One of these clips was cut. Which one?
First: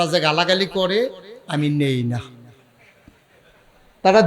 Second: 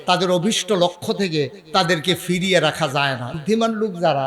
second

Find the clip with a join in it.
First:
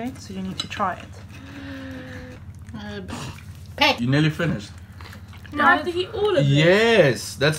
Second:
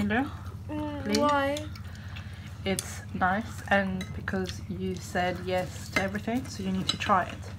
first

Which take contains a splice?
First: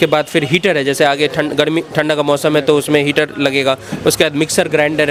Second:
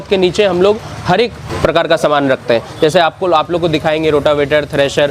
second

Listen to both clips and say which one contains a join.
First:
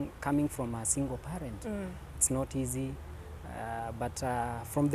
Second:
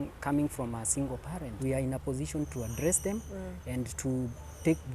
second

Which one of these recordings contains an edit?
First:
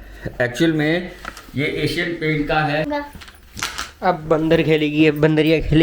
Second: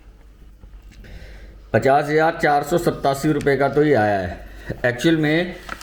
first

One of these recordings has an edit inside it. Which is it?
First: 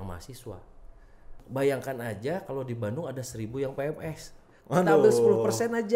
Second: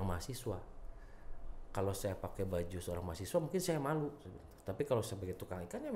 first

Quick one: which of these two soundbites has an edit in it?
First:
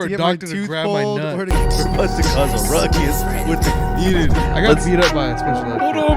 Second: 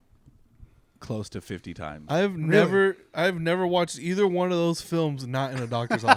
first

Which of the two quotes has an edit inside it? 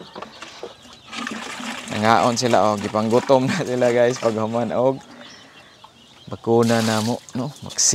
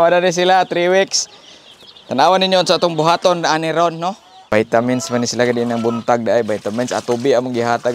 second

